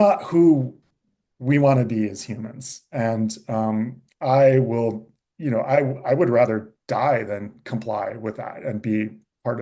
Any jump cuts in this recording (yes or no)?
no